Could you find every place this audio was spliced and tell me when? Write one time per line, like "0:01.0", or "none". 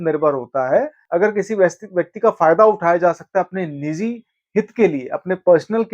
0:01.0